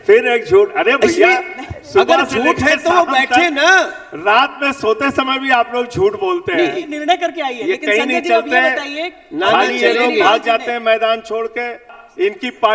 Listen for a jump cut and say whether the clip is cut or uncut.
cut